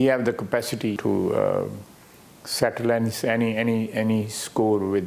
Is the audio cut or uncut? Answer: cut